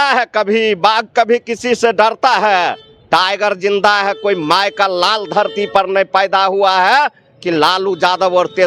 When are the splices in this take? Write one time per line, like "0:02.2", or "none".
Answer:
none

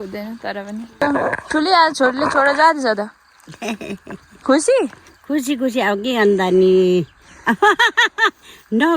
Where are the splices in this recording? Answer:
0:01.0

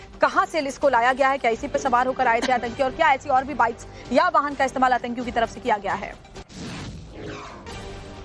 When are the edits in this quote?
none

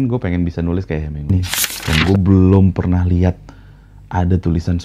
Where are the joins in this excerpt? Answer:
0:01.3

